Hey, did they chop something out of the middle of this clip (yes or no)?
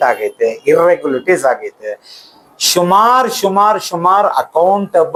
no